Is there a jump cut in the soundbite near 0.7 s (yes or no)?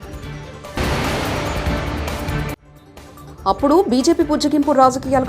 yes